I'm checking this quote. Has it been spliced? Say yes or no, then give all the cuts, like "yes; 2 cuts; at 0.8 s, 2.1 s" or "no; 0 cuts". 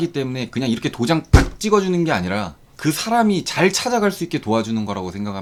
no; 0 cuts